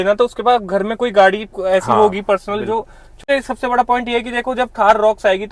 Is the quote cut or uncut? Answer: cut